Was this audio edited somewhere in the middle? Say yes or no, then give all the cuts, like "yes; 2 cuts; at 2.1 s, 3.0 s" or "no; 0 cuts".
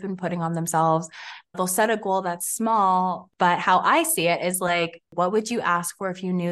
yes; 3 cuts; at 1.3 s, 3.2 s, 5.1 s